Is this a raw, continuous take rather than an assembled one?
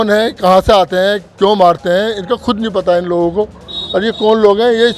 yes; 0 cuts

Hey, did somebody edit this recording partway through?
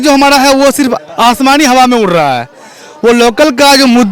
no; 0 cuts

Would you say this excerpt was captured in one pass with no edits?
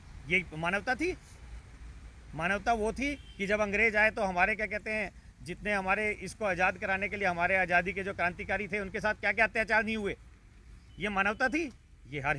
yes; 0 cuts

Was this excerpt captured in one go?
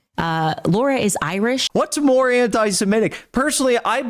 no; 1 cut; at 1.6 s

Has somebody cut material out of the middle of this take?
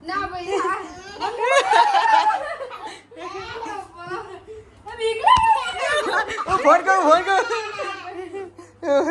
no; 0 cuts

